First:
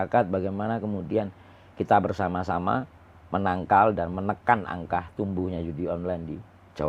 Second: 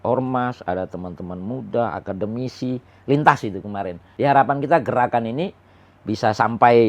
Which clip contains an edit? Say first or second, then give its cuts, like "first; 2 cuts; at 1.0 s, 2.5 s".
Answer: second; 1 cut; at 4.0 s